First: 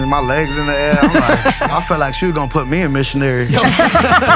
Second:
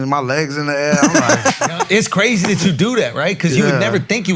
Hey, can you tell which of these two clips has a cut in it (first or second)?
first